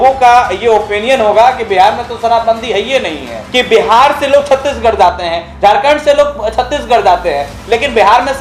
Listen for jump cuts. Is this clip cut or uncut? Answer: cut